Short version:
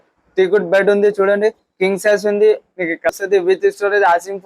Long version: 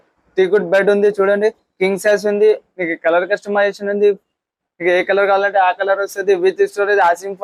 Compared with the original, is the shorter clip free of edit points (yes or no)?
no